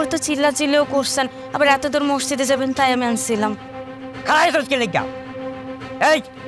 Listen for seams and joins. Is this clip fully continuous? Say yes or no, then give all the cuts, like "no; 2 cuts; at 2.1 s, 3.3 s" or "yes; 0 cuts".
yes; 0 cuts